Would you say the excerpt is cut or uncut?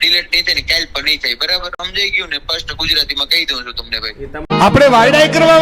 uncut